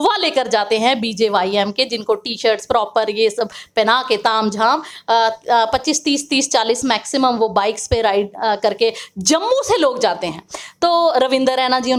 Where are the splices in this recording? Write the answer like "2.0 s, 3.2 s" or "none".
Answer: none